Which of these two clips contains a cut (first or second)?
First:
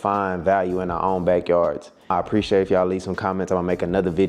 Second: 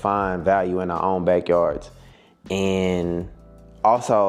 first